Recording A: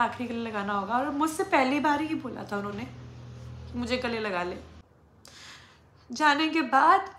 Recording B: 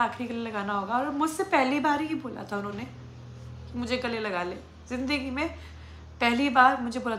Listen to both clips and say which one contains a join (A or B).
A